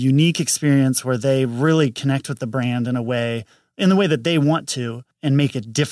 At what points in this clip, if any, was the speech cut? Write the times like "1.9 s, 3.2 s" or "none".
5.0 s